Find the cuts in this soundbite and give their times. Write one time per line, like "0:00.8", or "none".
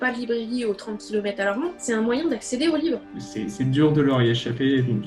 0:01.8
0:03.1